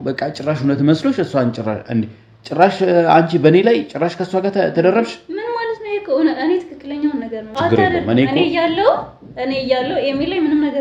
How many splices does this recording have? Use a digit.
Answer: 1